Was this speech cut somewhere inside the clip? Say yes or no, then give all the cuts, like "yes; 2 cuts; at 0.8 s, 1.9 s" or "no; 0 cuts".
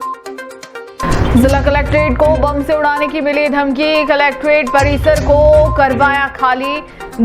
yes; 1 cut; at 1.0 s